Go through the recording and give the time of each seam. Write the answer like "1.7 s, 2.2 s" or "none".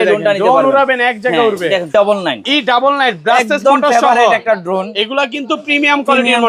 1.9 s